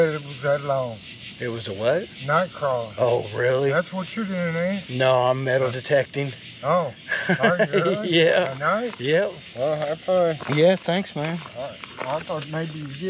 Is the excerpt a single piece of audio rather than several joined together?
no; 1 cut; at 9.4 s

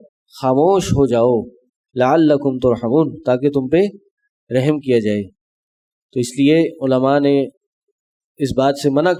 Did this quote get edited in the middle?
no; 0 cuts

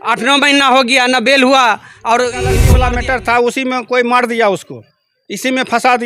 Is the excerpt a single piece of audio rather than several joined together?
no; 1 cut; at 2.6 s

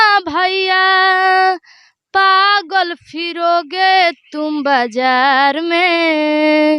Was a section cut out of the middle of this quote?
no; 0 cuts

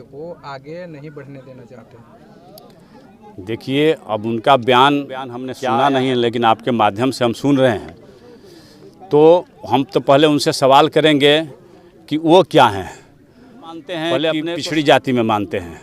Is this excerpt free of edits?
no; 2 cuts; at 5.5 s, 14.5 s

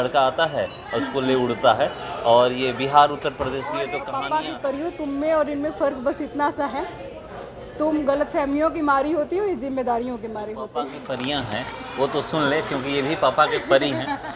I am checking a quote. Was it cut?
yes; 2 cuts; at 4.0 s, 10.9 s

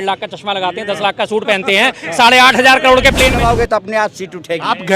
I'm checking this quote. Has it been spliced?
yes; 1 cut; at 3.4 s

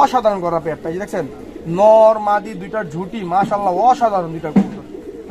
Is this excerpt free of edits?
yes; 0 cuts

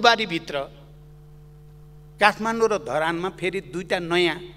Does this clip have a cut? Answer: no; 0 cuts

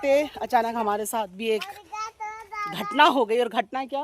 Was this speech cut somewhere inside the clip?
no; 0 cuts

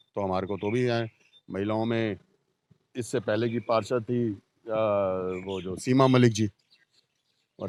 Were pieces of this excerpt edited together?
no; 0 cuts

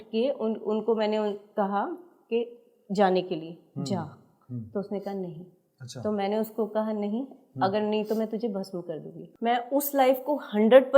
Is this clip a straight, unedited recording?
no; 1 cut; at 9.2 s

